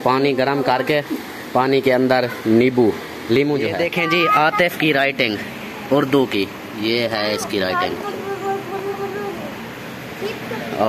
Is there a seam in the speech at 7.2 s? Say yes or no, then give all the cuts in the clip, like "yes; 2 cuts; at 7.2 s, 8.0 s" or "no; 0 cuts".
no; 1 cut; at 3.8 s